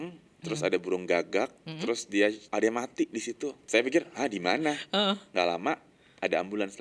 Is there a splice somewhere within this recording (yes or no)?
yes